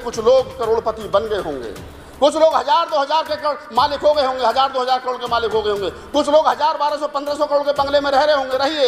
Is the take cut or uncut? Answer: uncut